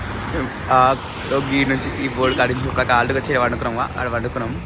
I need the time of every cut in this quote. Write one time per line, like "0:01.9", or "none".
none

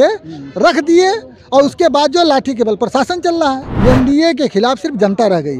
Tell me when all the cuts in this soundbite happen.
0:03.7

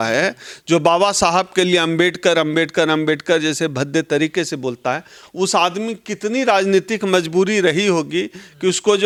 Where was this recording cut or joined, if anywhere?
none

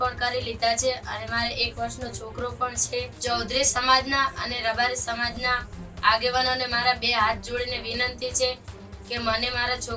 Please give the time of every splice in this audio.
0:03.1

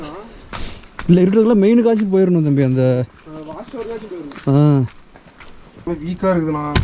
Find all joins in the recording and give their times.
0:05.9

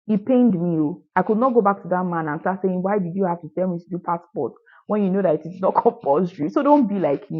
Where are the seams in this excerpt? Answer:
0:01.0

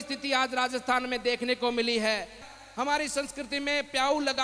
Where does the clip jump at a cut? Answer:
0:02.4

